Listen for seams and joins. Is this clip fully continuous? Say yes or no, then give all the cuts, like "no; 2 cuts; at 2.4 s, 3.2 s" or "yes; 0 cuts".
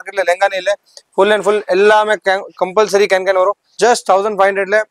no; 1 cut; at 3.7 s